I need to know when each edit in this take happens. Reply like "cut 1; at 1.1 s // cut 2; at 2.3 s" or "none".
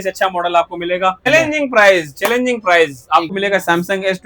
cut 1; at 1.2 s // cut 2; at 3.3 s